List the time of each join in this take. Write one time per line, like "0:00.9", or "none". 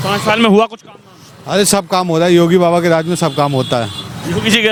none